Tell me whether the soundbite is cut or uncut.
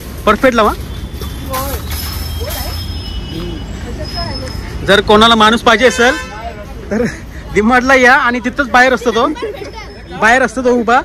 uncut